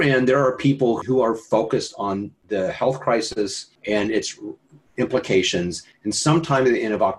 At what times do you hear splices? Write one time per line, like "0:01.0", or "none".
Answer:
0:01.0
0:03.7

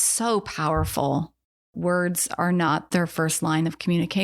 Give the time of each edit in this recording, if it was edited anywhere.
0:01.7
0:02.8

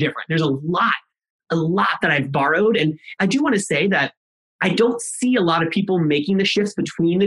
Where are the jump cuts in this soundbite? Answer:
0:03.2

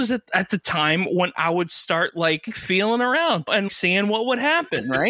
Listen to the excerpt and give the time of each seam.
0:02.6
0:03.7

